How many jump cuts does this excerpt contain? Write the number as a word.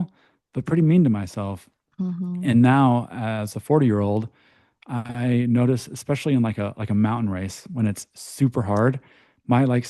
zero